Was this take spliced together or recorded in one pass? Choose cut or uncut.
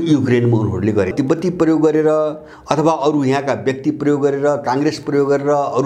cut